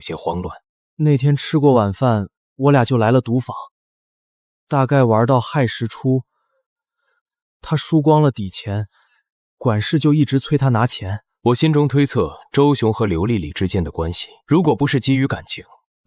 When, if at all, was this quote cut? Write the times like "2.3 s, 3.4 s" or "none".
11.3 s